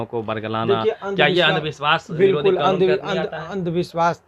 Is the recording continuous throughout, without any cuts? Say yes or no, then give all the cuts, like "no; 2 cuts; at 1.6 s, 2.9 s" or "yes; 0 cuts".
yes; 0 cuts